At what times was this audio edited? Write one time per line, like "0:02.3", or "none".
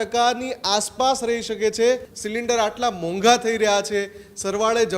0:02.2